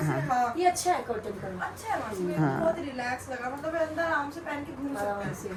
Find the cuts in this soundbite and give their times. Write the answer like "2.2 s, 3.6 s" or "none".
none